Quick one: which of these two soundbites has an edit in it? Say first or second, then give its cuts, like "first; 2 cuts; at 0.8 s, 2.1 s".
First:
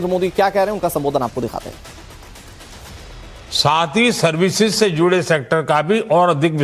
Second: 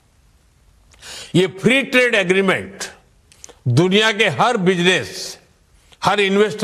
second; 1 cut; at 1.6 s